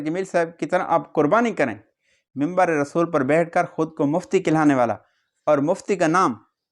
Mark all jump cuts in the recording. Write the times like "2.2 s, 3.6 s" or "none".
2.2 s